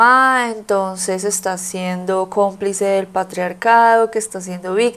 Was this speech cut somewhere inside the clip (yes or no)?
no